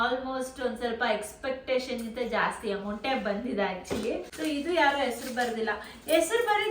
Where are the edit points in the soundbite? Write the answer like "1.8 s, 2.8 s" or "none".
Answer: 4.3 s